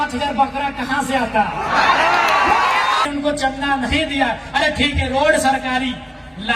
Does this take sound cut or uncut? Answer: cut